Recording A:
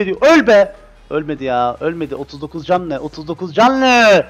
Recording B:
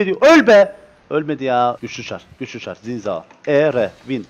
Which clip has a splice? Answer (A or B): B